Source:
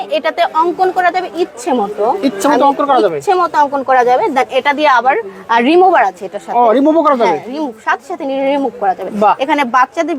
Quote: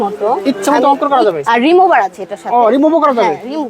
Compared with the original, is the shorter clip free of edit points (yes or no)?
no